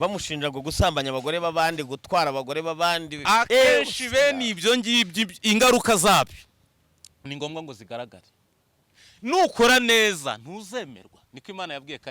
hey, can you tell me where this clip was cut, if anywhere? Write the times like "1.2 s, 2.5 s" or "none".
none